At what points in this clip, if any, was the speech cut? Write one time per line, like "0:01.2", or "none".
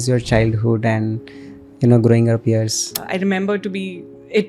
0:02.9